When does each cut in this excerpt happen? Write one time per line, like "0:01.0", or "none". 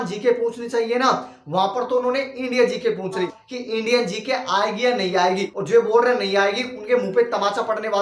0:03.3
0:05.5